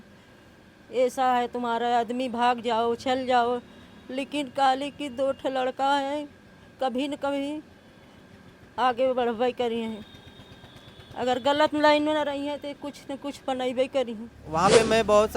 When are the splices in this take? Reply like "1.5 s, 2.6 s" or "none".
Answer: 14.3 s